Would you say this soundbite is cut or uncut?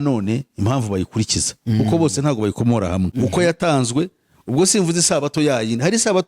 cut